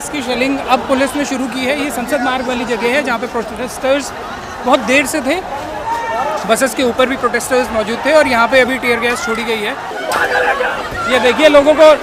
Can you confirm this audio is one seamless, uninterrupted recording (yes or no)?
no